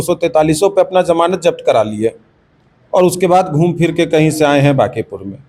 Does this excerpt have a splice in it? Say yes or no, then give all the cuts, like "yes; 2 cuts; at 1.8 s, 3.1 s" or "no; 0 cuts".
no; 0 cuts